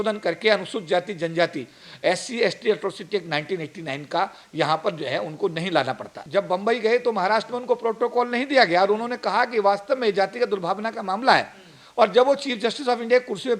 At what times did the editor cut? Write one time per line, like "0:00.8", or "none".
0:06.2